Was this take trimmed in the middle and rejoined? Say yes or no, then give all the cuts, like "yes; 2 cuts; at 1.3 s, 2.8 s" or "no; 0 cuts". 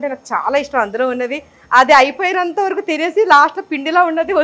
no; 0 cuts